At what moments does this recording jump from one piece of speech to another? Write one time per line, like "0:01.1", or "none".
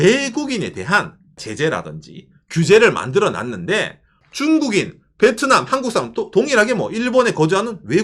0:01.5
0:04.1